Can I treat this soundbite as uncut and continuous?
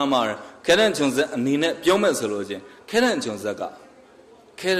yes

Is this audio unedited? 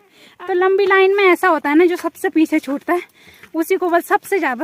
yes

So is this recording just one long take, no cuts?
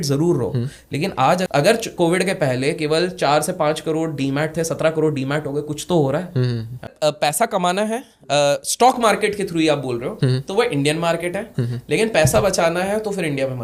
no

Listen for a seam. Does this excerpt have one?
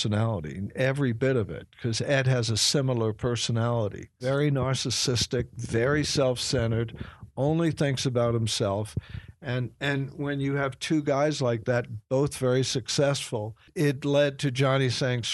yes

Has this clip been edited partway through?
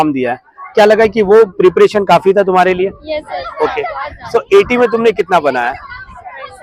no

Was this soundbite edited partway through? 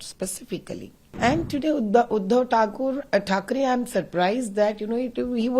yes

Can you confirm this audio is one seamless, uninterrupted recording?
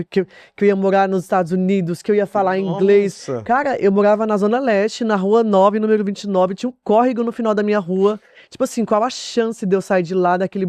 yes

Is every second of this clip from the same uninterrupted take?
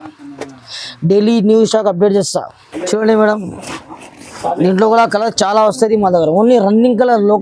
no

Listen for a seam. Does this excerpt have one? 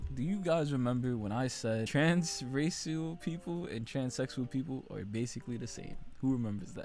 yes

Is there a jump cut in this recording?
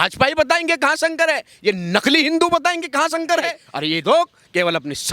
yes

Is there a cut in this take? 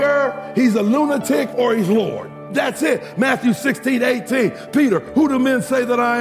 yes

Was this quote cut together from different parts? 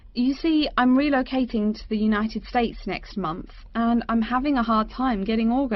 no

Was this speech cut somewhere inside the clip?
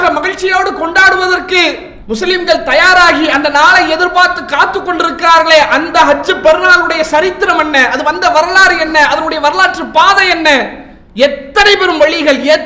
no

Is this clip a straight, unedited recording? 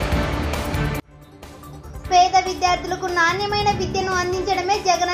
yes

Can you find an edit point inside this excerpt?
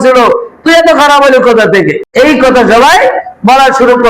yes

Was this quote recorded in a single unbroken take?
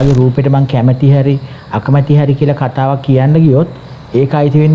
yes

